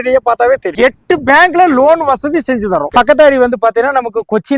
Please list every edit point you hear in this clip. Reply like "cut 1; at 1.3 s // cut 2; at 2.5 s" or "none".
cut 1; at 0.7 s // cut 2; at 2.9 s